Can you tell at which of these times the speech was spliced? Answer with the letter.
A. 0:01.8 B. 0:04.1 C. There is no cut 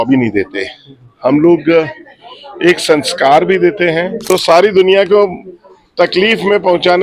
B